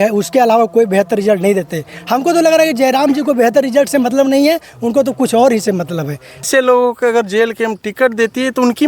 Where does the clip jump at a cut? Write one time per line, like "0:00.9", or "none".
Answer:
0:06.4